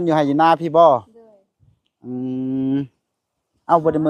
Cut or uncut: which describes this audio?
uncut